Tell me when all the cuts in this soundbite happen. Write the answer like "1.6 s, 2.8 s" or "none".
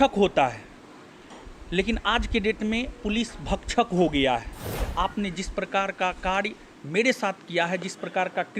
4.8 s